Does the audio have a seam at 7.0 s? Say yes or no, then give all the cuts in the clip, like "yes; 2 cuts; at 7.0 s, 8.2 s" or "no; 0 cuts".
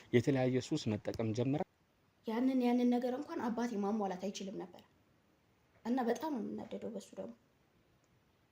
no; 1 cut; at 1.6 s